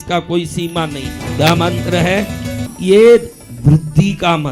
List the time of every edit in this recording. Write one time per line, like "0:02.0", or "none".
0:01.2
0:02.6

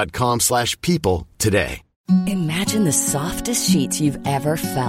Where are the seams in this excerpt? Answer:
0:01.9

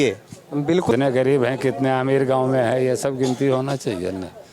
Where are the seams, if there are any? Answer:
0:00.9

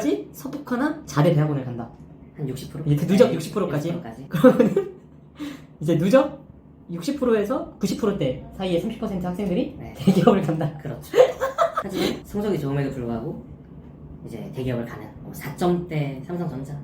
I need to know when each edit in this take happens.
0:09.9
0:15.2

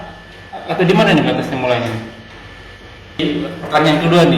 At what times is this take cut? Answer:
0:03.2

